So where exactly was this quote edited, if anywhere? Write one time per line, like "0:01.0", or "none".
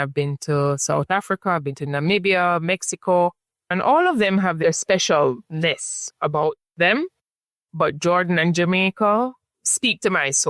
none